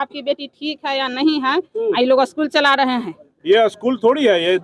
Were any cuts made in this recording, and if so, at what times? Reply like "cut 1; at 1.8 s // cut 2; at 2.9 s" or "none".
cut 1; at 3.3 s